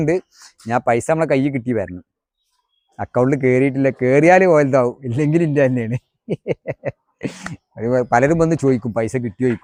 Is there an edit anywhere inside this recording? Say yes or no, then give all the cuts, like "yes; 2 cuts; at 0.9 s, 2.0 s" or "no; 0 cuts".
no; 0 cuts